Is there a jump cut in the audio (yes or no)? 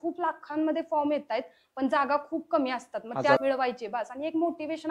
yes